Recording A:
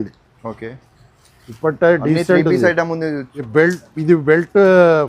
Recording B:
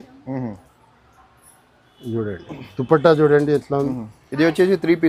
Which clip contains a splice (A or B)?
A